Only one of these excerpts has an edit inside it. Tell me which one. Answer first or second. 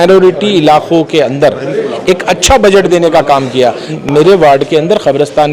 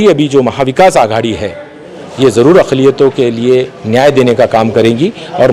first